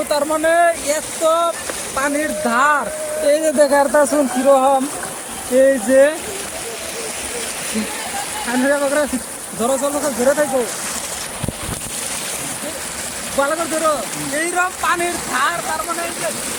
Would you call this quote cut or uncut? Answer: uncut